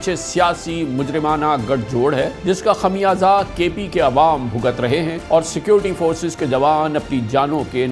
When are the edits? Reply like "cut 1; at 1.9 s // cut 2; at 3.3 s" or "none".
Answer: cut 1; at 2.4 s // cut 2; at 5.2 s